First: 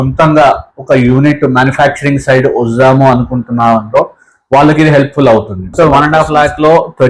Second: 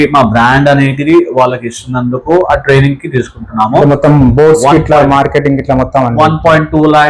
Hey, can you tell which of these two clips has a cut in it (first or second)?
first